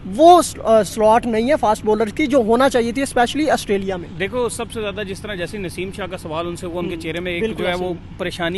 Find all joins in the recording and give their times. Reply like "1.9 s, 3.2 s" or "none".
none